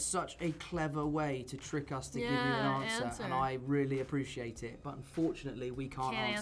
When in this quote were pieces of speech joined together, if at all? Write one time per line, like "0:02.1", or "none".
none